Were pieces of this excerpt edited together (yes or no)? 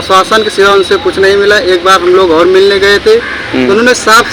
no